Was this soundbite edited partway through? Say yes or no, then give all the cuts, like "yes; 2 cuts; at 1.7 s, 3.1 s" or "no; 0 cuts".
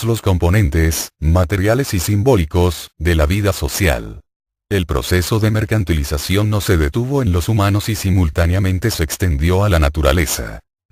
no; 0 cuts